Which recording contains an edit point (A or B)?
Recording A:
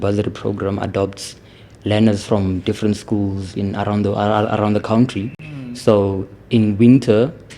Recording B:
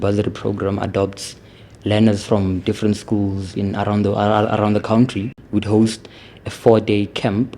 B